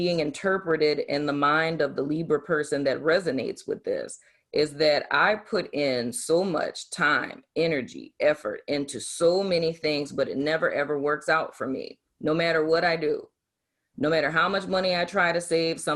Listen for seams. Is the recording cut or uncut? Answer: uncut